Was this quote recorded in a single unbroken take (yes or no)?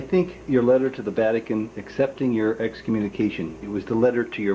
yes